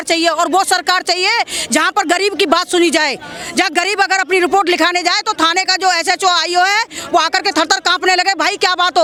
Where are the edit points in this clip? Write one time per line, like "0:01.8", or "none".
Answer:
none